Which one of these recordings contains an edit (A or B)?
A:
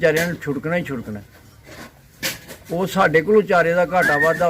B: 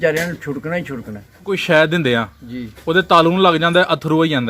B